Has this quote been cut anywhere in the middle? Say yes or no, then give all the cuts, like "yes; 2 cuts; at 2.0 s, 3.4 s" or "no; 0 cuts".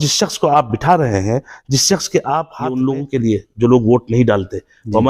yes; 1 cut; at 2.8 s